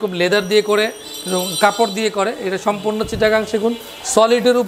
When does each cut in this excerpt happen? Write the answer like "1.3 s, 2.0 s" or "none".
none